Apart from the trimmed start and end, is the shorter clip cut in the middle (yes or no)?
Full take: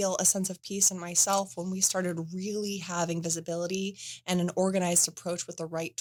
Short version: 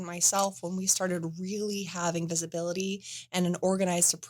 no